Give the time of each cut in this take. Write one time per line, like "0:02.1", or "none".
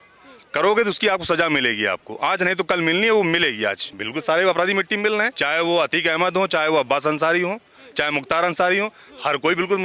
0:03.8
0:05.4